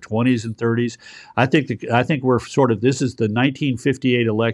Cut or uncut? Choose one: uncut